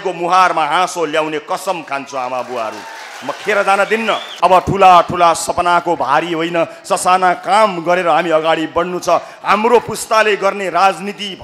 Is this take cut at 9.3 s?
no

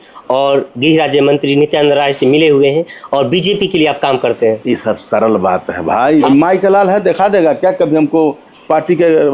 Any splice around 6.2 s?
yes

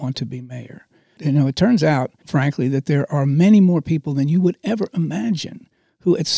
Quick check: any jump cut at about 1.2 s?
yes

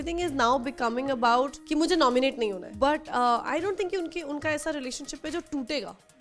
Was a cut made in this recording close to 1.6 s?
yes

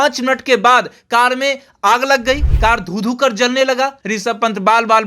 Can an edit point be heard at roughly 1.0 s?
no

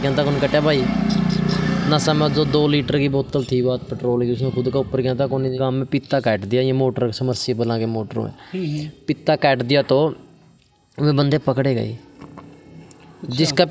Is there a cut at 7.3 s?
no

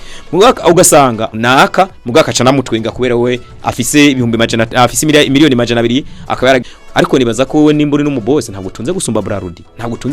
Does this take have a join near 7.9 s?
no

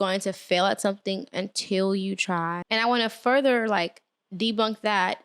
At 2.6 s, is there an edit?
yes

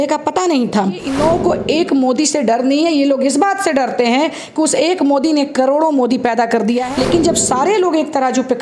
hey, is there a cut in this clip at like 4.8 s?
no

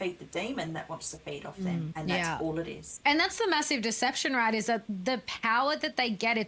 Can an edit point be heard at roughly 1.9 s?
yes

